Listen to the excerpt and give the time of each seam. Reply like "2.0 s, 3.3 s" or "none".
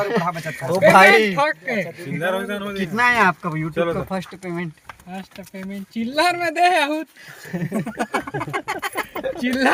none

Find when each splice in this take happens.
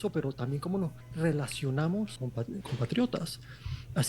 1.0 s, 2.6 s

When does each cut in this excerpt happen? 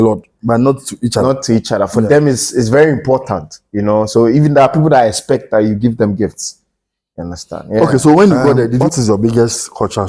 8.9 s

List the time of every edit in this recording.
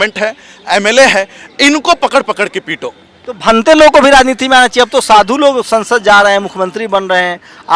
none

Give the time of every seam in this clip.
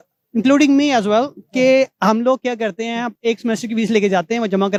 none

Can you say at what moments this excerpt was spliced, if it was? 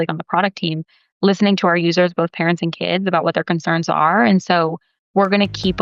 none

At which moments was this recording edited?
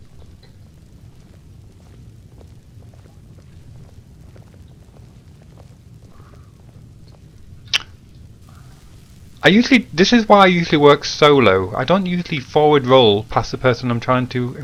none

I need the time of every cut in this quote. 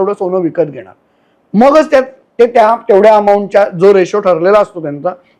none

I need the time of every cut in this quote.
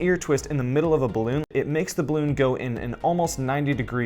1.5 s

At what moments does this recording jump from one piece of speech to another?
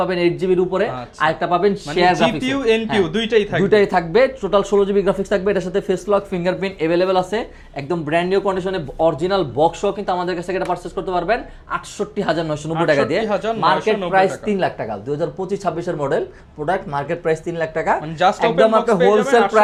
none

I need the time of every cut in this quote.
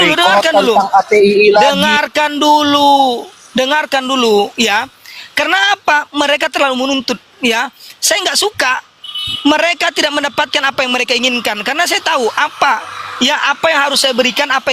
none

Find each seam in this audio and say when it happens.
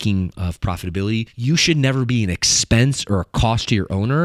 1.3 s

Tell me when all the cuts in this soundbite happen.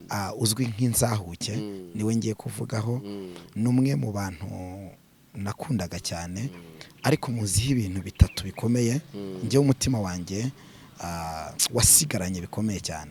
none

